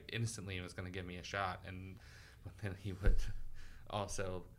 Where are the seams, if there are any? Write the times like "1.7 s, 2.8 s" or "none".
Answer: 1.9 s